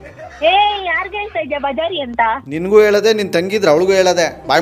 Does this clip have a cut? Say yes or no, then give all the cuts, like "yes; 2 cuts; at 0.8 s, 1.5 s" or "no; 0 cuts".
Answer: no; 0 cuts